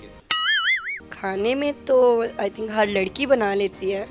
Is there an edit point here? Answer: no; 0 cuts

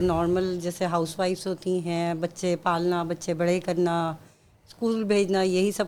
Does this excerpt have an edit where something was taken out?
no; 0 cuts

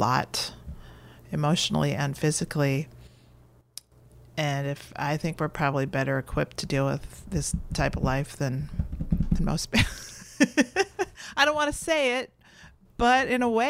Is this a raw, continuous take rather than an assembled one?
yes; 0 cuts

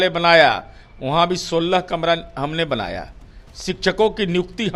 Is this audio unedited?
yes; 0 cuts

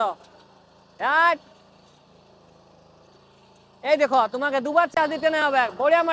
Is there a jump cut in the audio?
no; 0 cuts

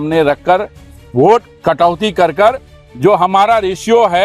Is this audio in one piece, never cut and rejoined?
no; 1 cut; at 1.5 s

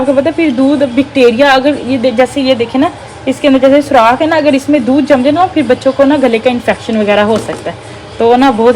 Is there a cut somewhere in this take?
no; 0 cuts

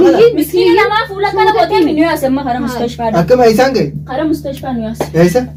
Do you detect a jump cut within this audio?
no; 0 cuts

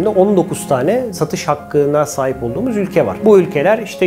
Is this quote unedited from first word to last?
no; 1 cut; at 3.1 s

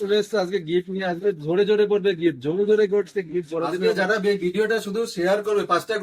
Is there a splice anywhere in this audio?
yes; 1 cut; at 3.8 s

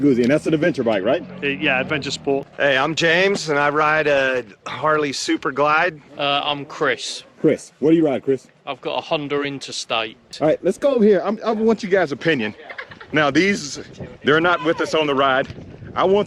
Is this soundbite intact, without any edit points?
no; 3 cuts; at 2.5 s, 6.0 s, 10.2 s

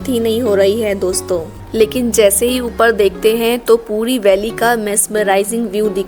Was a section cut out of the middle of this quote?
no; 0 cuts

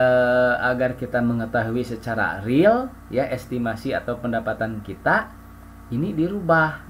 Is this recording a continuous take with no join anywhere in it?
yes; 0 cuts

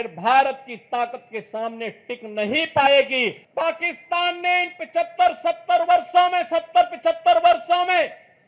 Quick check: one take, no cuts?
no; 1 cut; at 3.4 s

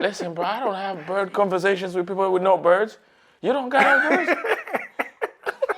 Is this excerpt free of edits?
yes; 0 cuts

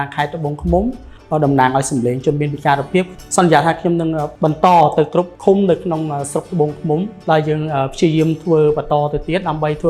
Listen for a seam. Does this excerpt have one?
yes; 5 cuts; at 1.1 s, 3.1 s, 4.3 s, 5.3 s, 7.1 s

